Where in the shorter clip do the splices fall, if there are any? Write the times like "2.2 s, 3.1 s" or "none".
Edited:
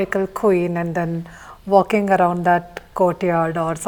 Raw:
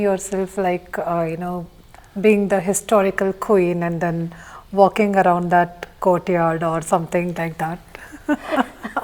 none